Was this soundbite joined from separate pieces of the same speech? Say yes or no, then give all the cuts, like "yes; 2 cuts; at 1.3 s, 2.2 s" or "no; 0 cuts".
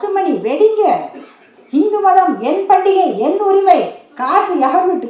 no; 0 cuts